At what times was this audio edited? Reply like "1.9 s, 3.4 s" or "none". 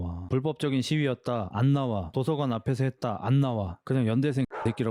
3.7 s